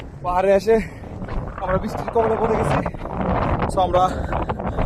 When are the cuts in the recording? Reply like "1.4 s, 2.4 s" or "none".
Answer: none